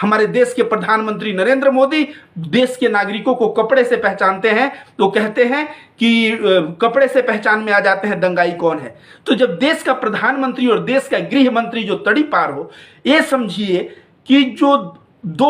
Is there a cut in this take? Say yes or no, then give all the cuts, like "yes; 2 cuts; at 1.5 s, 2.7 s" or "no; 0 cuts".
no; 0 cuts